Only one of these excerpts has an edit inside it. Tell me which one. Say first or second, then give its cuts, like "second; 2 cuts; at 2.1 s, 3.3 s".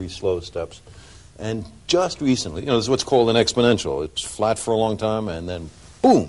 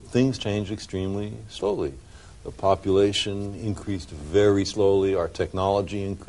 second; 1 cut; at 4.7 s